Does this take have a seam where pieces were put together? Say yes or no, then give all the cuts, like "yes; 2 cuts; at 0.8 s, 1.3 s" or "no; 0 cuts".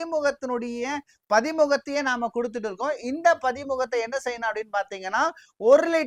no; 0 cuts